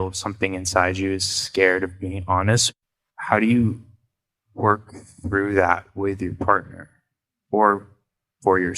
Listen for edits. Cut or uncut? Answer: cut